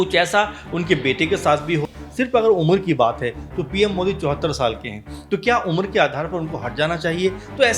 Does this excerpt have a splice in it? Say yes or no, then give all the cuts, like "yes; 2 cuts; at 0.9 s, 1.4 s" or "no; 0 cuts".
yes; 1 cut; at 1.8 s